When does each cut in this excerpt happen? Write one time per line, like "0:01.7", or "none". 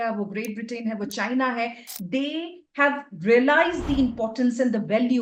none